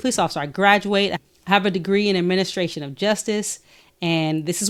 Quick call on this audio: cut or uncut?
uncut